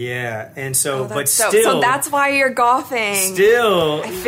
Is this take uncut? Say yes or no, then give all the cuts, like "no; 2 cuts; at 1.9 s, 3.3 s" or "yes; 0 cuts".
yes; 0 cuts